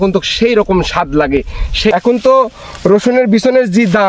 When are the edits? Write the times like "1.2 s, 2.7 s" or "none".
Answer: 1.9 s